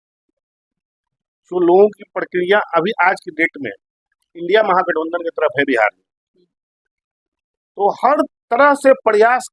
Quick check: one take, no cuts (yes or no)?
yes